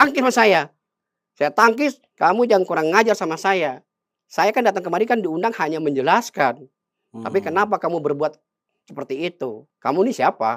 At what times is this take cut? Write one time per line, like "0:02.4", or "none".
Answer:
0:02.0
0:09.7